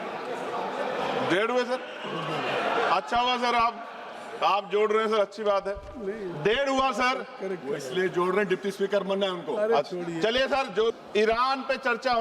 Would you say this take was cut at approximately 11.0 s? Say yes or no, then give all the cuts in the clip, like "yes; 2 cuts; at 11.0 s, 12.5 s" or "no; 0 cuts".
yes; 1 cut; at 11.0 s